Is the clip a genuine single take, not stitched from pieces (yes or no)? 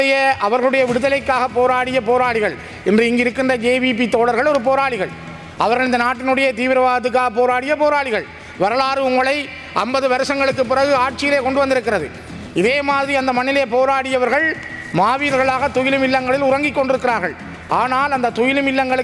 yes